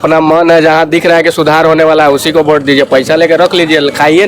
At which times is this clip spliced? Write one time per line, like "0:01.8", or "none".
none